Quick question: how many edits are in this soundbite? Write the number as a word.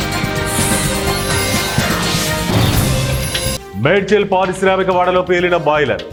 zero